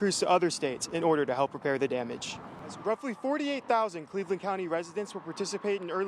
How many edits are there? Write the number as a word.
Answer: one